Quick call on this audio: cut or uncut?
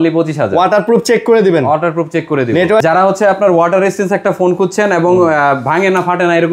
cut